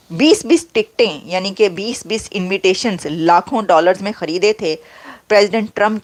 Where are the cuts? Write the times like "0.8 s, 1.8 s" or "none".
none